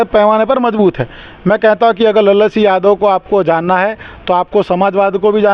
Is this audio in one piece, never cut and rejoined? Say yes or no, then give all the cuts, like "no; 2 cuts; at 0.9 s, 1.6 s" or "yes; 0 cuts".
yes; 0 cuts